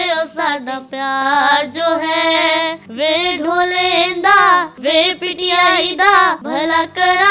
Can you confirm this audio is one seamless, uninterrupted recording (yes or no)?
yes